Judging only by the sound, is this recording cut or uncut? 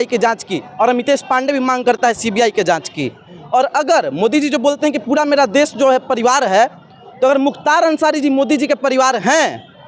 uncut